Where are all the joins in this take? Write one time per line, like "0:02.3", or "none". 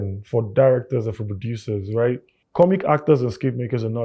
0:02.4